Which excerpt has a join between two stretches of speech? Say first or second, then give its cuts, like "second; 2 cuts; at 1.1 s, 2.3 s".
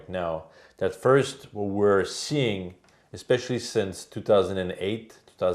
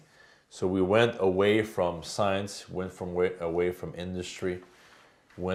first; 1 cut; at 2.1 s